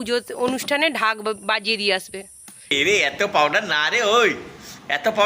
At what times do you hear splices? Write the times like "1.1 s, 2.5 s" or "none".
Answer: 2.7 s